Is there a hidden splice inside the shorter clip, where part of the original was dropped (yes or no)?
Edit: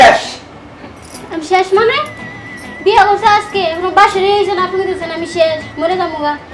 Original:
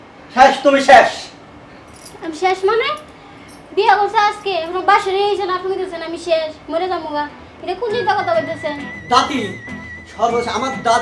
no